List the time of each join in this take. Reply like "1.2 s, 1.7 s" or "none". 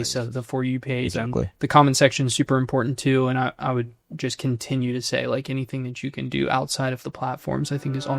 4.0 s